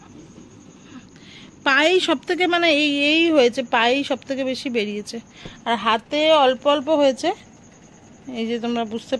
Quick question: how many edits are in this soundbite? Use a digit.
0